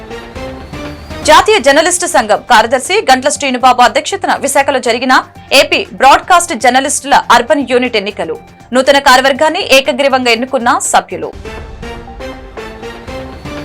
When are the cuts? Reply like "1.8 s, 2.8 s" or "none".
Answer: none